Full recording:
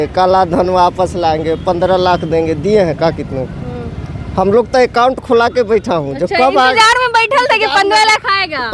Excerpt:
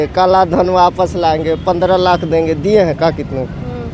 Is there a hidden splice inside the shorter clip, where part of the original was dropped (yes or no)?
no